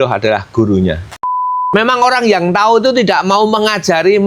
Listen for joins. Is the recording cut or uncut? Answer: cut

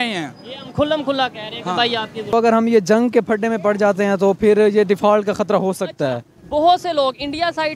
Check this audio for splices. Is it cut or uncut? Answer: cut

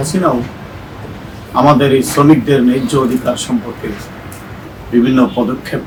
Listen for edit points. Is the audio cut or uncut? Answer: uncut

